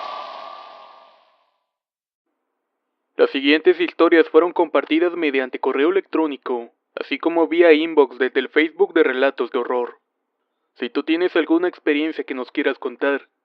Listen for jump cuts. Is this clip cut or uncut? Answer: uncut